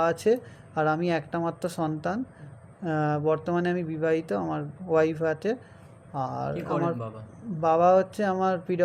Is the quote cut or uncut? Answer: uncut